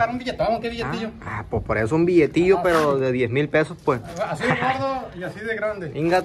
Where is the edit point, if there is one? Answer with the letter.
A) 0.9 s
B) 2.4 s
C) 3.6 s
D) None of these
D